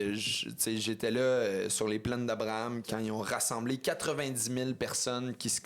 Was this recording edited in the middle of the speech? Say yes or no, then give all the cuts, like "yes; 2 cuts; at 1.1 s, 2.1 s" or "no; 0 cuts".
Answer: yes; 1 cut; at 2.9 s